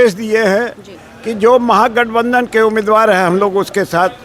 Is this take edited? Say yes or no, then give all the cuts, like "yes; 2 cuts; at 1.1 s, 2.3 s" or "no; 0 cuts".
no; 0 cuts